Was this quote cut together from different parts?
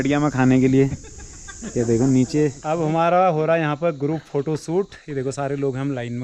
yes; 1 cut; at 2.6 s

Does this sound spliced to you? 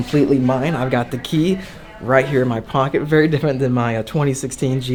no; 0 cuts

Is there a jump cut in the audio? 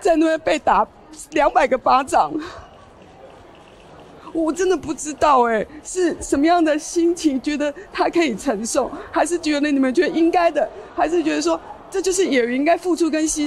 no; 0 cuts

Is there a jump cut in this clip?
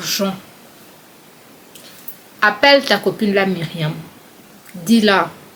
no; 0 cuts

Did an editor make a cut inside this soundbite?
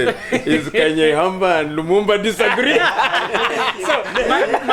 no; 0 cuts

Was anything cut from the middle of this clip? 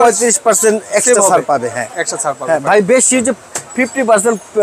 no; 0 cuts

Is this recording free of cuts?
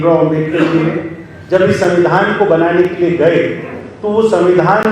yes; 0 cuts

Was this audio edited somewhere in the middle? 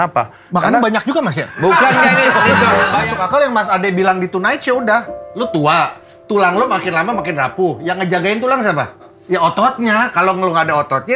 yes; 1 cut; at 3.1 s

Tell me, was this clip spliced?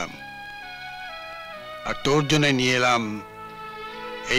no; 0 cuts

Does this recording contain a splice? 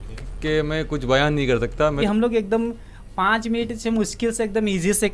yes; 1 cut; at 2.0 s

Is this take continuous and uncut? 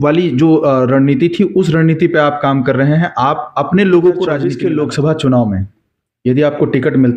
no; 1 cut; at 4.5 s

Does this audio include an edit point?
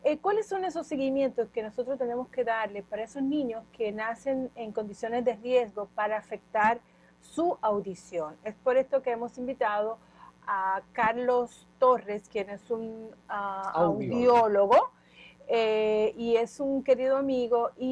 no; 0 cuts

